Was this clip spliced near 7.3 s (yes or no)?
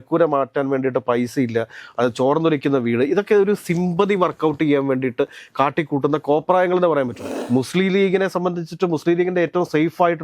yes